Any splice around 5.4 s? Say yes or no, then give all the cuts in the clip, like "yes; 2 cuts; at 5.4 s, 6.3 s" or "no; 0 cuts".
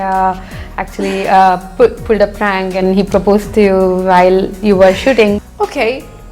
yes; 1 cut; at 5.4 s